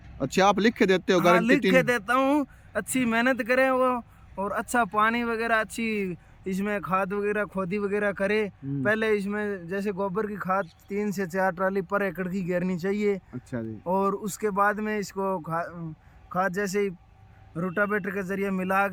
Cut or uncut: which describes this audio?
uncut